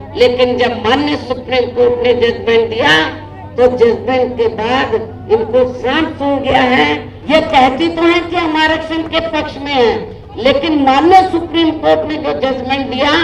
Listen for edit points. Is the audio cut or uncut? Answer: cut